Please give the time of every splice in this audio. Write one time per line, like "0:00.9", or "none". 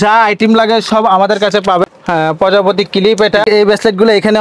0:01.8
0:03.4